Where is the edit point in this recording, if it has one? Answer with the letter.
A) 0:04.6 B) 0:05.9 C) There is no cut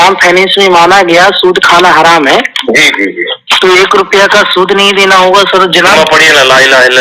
B